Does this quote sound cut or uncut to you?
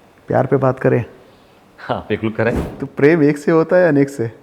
cut